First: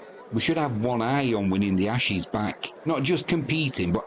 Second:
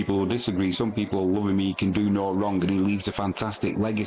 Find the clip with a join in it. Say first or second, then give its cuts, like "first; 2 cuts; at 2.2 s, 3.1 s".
first; 1 cut; at 2.7 s